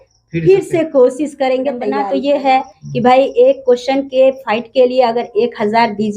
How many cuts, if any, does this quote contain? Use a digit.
1